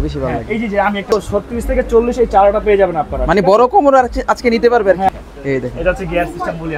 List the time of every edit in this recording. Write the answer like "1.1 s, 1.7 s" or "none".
1.0 s, 5.1 s